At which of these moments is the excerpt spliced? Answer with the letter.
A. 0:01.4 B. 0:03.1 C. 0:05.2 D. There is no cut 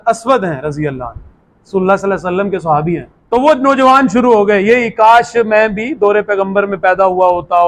B